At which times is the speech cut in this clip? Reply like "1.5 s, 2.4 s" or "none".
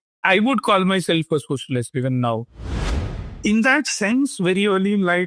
3.0 s